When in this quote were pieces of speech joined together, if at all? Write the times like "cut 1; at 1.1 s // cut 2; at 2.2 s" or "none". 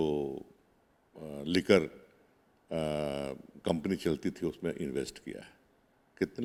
none